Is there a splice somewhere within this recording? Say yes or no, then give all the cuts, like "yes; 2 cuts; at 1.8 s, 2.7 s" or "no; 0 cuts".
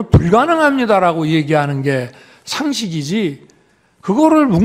no; 0 cuts